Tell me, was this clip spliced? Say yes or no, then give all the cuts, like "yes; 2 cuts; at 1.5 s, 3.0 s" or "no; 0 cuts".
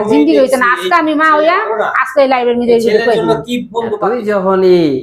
yes; 1 cut; at 4.0 s